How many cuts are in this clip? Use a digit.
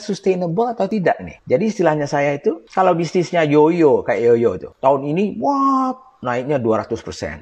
3